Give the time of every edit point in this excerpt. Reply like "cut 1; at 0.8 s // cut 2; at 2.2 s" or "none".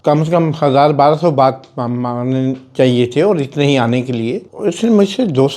cut 1; at 4.5 s